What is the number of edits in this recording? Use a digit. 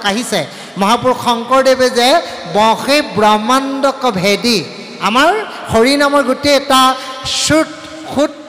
0